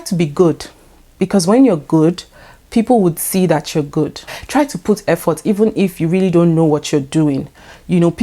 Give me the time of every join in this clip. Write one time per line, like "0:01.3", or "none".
0:04.3

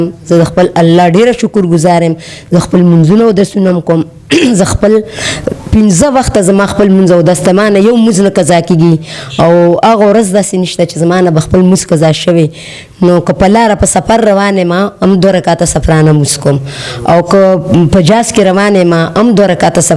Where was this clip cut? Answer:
none

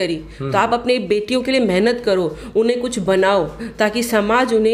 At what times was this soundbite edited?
none

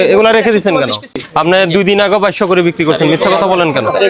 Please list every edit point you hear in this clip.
0:01.1

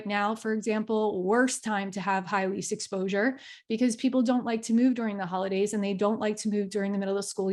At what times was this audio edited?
none

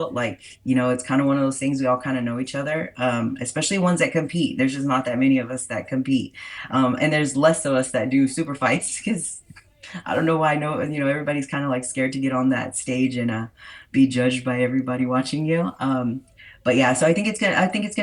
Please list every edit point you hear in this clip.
none

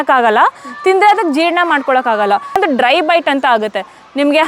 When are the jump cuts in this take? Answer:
0:02.6

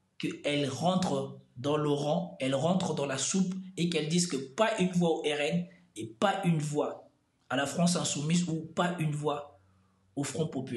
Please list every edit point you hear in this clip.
none

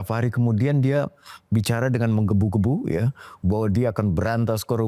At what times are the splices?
none

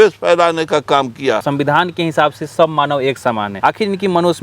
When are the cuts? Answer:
0:01.4
0:03.5

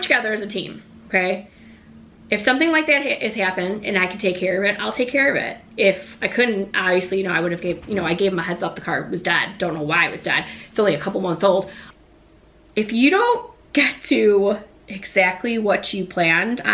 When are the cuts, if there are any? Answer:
0:11.8

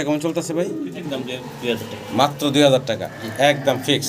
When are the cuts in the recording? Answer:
0:01.1

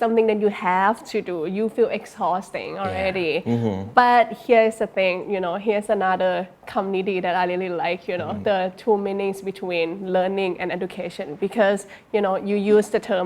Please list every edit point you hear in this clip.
none

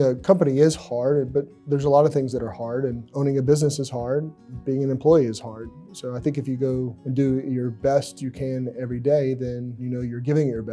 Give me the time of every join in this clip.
0:03.0
0:07.0
0:09.7

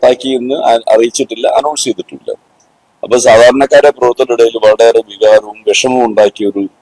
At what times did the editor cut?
none

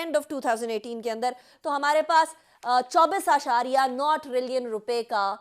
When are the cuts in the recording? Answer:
none

